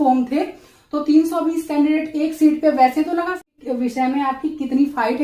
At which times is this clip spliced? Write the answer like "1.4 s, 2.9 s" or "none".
3.5 s